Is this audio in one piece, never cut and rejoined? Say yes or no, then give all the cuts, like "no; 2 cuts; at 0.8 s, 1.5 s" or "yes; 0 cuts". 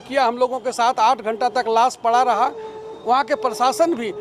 yes; 0 cuts